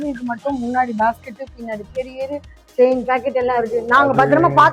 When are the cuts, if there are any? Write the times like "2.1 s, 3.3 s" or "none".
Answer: none